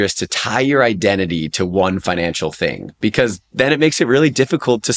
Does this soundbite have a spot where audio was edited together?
no; 0 cuts

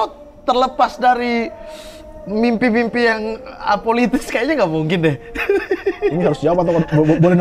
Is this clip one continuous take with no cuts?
yes; 0 cuts

